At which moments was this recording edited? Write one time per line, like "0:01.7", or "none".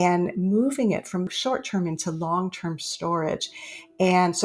0:01.3